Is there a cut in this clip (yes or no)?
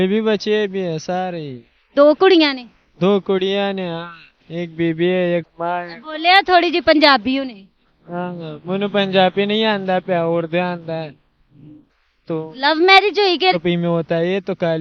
yes